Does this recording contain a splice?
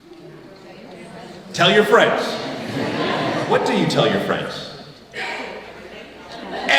no; 0 cuts

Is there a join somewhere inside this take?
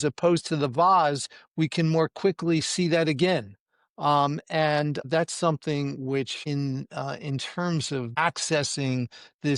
yes; 3 cuts; at 5.1 s, 6.4 s, 8.1 s

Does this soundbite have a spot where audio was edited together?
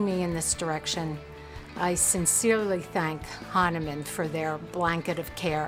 no; 0 cuts

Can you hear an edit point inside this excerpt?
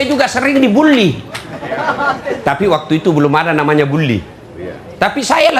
no; 0 cuts

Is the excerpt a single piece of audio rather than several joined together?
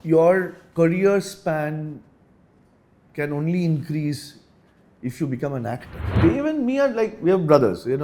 no; 1 cut; at 6.2 s

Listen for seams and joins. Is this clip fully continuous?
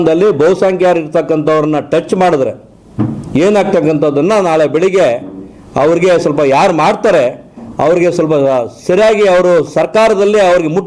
yes; 0 cuts

